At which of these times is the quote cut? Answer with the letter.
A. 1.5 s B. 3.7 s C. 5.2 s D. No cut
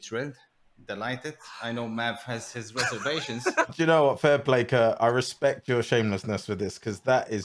B